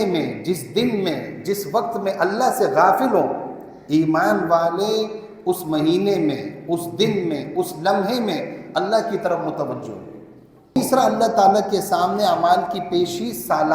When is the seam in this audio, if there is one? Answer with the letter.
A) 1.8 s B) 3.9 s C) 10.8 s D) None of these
C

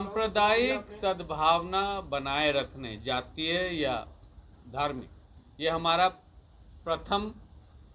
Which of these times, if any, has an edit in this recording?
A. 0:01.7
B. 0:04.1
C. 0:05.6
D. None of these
D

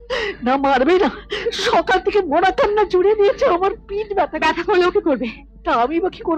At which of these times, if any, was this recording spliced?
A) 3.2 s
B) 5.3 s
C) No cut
C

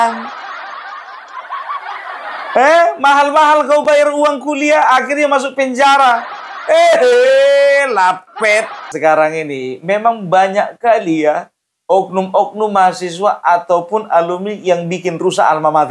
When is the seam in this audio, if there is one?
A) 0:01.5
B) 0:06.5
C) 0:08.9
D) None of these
C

